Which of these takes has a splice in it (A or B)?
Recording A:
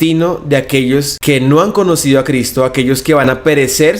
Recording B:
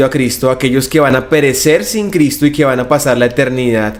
A